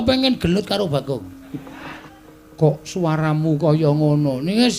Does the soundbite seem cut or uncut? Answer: cut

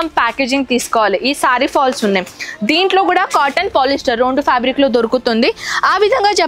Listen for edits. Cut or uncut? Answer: uncut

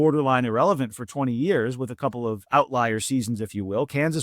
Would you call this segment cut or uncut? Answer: cut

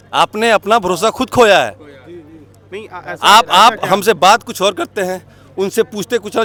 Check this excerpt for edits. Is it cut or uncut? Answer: uncut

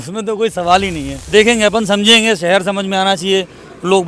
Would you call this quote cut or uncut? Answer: cut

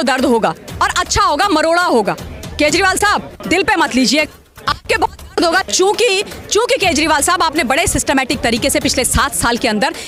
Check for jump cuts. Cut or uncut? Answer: uncut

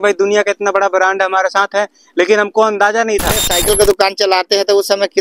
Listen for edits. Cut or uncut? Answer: cut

